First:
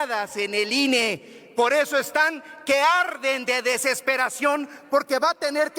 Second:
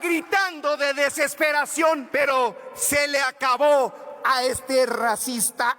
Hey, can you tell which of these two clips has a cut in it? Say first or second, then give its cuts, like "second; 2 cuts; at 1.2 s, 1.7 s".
second; 1 cut; at 2.0 s